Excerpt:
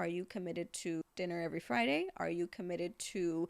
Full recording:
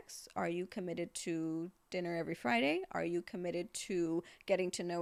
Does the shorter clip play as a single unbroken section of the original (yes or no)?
no